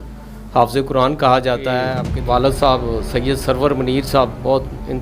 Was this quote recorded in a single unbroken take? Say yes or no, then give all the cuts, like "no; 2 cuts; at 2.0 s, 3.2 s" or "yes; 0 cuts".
no; 1 cut; at 2.1 s